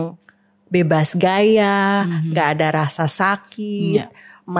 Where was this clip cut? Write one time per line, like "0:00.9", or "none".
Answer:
none

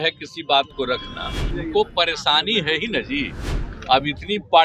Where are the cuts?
0:01.5

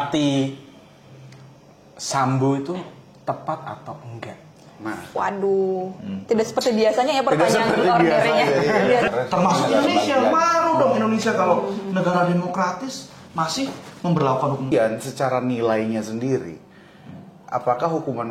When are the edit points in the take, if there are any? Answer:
0:09.1
0:14.7

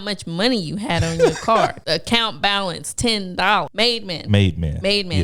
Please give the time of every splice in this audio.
0:01.8
0:03.7

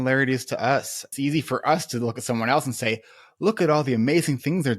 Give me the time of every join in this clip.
0:01.0

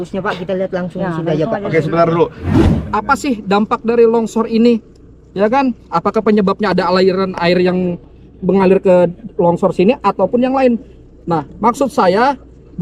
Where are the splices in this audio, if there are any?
0:02.6

